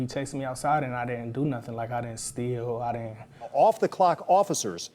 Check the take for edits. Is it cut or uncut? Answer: cut